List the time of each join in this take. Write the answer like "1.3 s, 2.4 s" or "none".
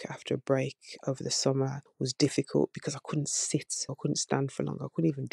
1.8 s, 3.9 s

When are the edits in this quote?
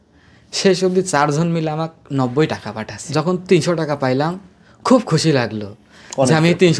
3.0 s

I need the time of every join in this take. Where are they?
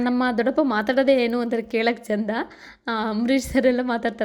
none

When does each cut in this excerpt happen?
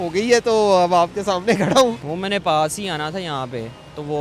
2.0 s

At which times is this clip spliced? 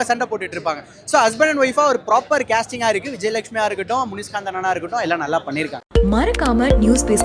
5.8 s

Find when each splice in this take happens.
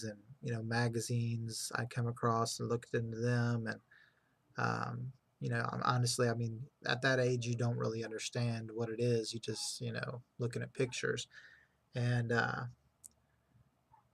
1.5 s

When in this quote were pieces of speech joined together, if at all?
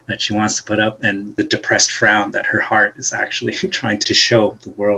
1.4 s, 4.0 s

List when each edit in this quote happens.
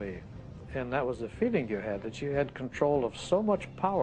none

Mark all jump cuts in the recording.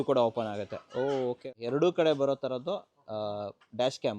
1.5 s

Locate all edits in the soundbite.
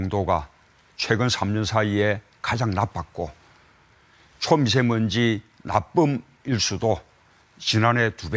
5.5 s

